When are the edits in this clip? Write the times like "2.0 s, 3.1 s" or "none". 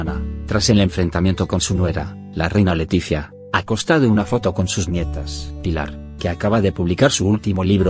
2.1 s